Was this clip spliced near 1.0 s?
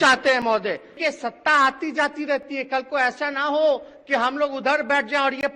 yes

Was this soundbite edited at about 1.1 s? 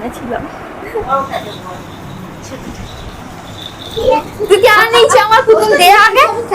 yes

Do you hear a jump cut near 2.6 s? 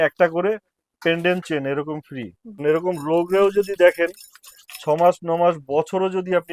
yes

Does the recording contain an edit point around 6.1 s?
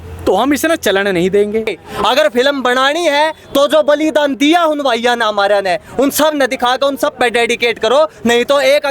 no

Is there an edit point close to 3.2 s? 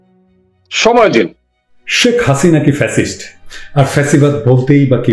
no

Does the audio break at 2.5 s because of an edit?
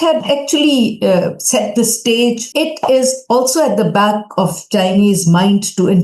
yes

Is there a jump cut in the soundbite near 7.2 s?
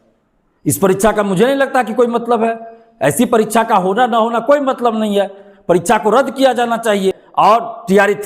yes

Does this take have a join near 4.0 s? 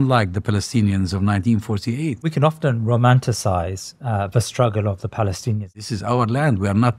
no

